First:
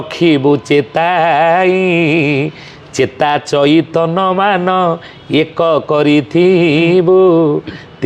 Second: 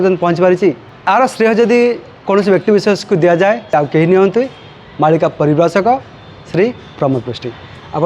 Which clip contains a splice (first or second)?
second